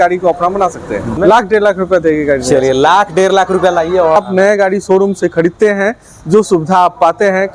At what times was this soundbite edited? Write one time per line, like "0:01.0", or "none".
0:01.1
0:04.2